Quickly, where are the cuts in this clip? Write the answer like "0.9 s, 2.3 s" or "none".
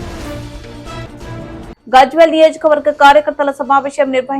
1.7 s